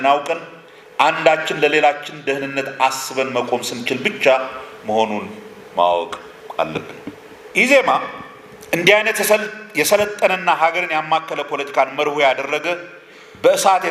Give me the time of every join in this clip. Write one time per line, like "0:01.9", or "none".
0:07.3